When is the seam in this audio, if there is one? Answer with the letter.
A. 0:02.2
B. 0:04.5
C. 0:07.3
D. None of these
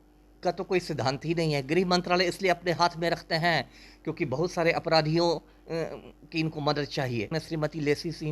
C